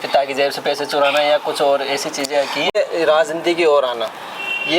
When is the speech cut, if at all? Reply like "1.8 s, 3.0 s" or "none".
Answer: 2.7 s